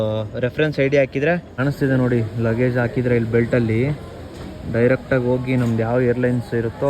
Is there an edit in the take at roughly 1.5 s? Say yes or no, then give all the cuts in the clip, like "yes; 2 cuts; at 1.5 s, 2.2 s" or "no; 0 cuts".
yes; 1 cut; at 1.5 s